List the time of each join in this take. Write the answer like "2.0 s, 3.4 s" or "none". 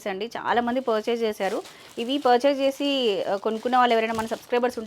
none